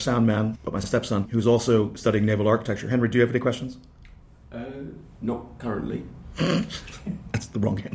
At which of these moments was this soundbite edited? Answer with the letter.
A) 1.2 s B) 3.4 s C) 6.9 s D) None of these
A